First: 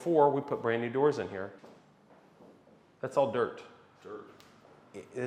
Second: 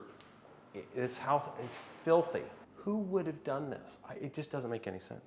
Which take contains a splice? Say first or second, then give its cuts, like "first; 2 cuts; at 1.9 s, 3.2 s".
second; 1 cut; at 2.5 s